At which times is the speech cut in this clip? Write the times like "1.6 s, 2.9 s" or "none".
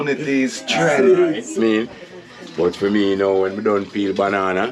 1.6 s